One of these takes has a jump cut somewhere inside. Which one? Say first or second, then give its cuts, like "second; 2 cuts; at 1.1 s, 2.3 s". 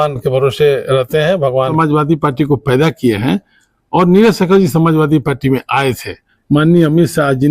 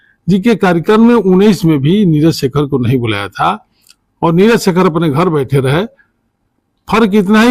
first; 2 cuts; at 1.7 s, 6.3 s